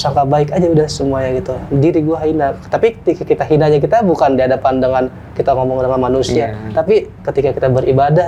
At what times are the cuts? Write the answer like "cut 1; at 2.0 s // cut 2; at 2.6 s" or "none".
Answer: none